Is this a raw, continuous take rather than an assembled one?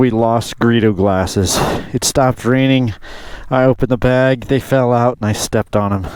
yes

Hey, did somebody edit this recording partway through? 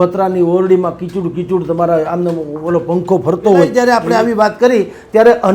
yes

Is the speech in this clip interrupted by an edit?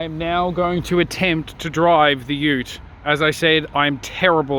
no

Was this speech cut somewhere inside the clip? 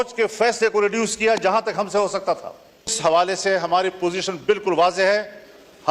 yes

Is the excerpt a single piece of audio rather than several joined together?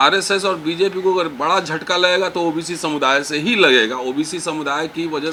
yes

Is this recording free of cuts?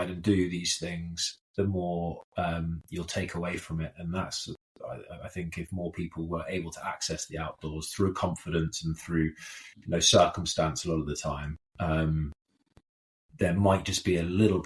yes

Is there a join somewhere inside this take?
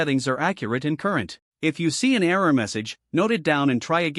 yes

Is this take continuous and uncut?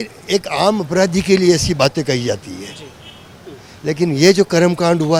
yes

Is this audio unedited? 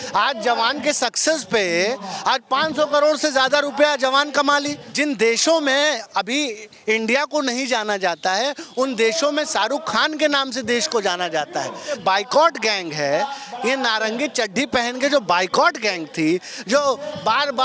no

